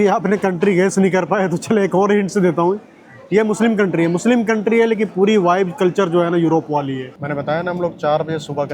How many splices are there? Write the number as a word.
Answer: one